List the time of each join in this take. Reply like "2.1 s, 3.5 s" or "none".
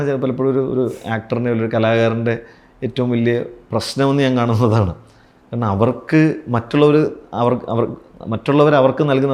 none